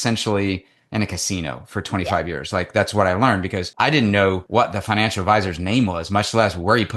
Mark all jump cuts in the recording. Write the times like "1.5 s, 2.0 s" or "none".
3.6 s, 4.4 s